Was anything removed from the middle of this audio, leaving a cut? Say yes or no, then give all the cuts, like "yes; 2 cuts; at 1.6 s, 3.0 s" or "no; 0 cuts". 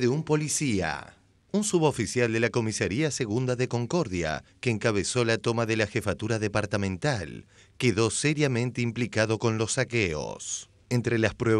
no; 0 cuts